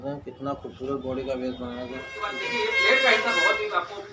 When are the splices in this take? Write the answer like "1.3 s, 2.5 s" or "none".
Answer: 2.4 s